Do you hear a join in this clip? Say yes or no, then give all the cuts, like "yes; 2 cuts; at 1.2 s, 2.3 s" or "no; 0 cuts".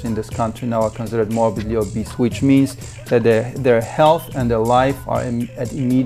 no; 0 cuts